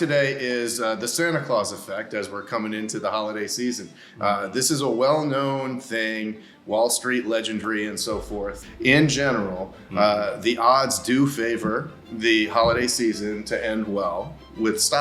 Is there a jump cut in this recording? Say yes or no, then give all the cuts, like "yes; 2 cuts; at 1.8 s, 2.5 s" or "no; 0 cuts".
yes; 1 cut; at 8.6 s